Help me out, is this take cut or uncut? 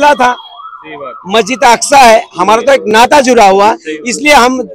uncut